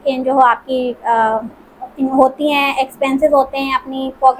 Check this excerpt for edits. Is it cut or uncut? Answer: uncut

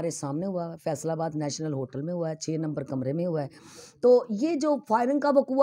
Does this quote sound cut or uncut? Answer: uncut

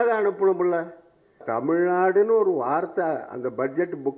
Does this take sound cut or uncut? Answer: cut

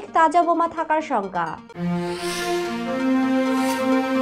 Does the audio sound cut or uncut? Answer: uncut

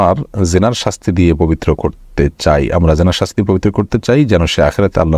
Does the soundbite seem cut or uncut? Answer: uncut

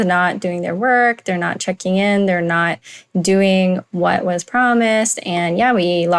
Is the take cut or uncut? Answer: uncut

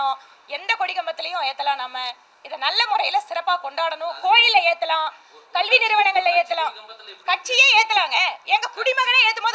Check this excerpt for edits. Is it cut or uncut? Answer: uncut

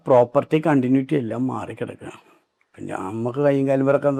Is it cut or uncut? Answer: uncut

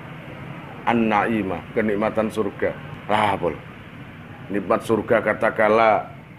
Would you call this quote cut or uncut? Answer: cut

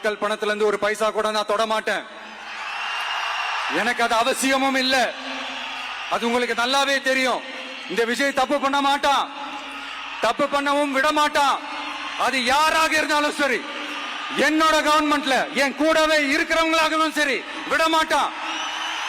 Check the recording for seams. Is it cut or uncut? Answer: uncut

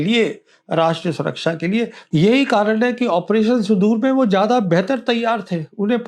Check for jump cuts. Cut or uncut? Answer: cut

